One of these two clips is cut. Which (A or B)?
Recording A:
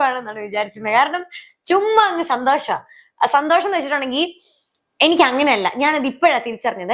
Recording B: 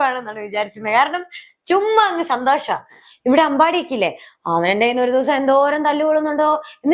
B